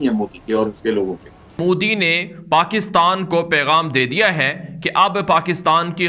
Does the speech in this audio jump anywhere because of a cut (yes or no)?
yes